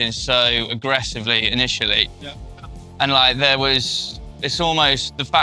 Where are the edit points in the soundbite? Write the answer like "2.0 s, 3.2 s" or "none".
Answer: none